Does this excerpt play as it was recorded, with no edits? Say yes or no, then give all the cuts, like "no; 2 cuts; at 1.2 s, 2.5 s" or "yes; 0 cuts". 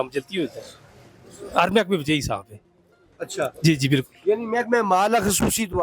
yes; 0 cuts